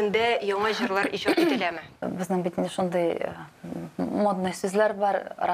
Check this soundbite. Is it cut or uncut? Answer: cut